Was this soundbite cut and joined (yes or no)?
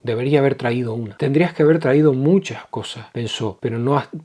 yes